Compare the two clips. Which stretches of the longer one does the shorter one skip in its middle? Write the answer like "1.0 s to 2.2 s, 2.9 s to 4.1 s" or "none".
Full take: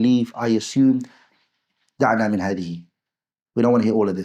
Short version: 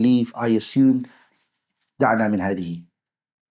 none